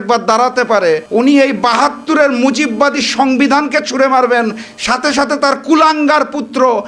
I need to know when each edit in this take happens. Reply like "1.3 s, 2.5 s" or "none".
1.0 s

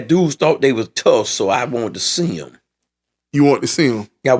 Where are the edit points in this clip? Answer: none

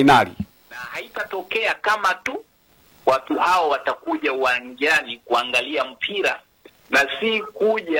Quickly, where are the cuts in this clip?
1.1 s

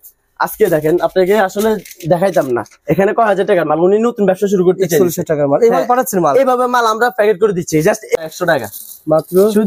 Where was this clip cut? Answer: 8.2 s

